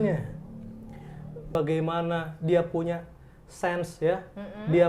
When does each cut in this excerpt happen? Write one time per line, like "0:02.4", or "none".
0:01.5